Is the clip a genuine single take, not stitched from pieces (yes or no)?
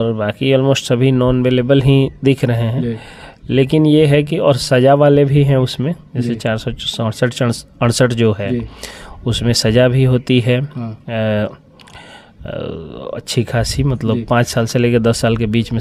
yes